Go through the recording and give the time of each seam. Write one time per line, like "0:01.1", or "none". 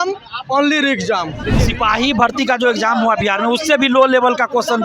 0:01.4

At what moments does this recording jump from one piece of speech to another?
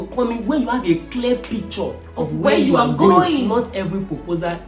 0:03.5

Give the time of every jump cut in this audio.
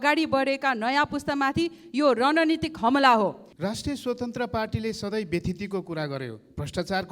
0:03.5

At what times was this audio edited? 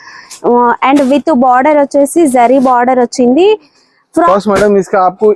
0:04.3

